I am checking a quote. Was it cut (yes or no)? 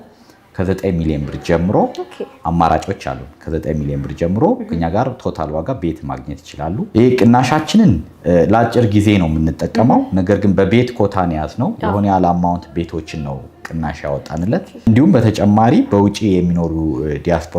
yes